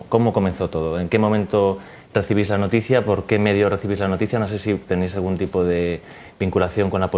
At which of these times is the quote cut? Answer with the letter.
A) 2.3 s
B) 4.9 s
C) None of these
C